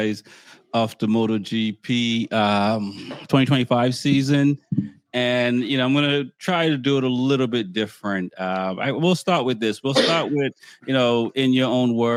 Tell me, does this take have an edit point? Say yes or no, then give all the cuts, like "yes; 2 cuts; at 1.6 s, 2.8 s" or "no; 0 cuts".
no; 0 cuts